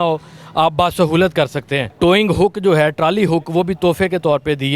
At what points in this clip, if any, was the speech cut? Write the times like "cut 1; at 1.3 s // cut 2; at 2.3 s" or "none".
cut 1; at 1.8 s